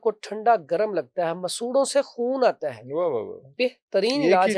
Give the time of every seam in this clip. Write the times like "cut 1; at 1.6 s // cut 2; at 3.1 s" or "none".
none